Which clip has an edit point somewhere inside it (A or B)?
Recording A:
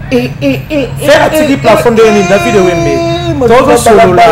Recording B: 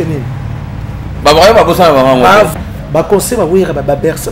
B